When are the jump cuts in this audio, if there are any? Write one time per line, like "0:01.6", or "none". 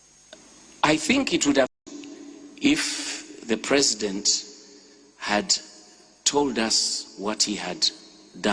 0:01.7